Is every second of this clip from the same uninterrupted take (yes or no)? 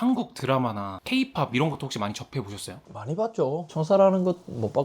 no